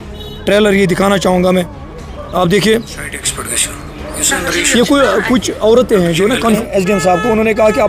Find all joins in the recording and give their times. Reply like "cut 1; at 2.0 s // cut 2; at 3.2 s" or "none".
cut 1; at 6.6 s

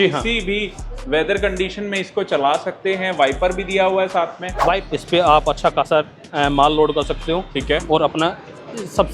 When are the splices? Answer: cut 1; at 4.8 s

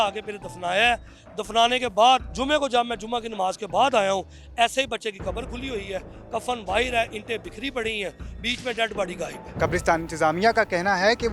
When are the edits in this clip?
cut 1; at 9.4 s

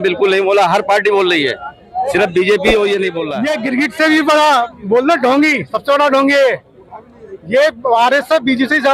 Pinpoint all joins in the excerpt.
cut 1; at 3.3 s

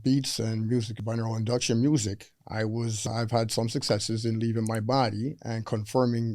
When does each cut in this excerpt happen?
cut 1; at 1.0 s // cut 2; at 3.0 s

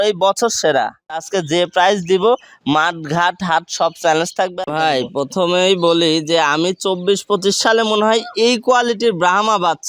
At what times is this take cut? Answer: cut 1; at 1.3 s // cut 2; at 4.5 s

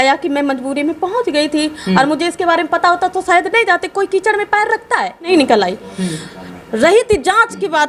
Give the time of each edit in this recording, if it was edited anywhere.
cut 1; at 5.3 s

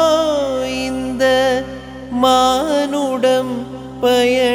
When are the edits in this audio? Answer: none

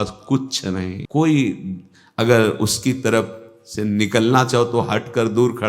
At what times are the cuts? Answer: cut 1; at 1.0 s

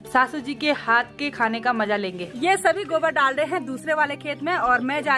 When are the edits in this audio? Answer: none

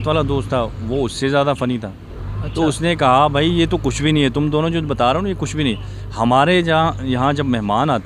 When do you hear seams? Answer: none

